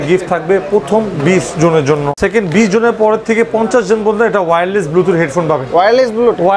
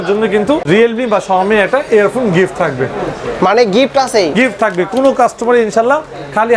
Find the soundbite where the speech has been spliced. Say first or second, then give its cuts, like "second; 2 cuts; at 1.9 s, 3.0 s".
first; 1 cut; at 2.2 s